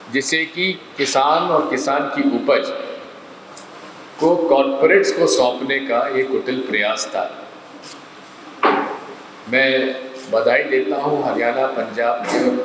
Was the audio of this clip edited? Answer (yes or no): no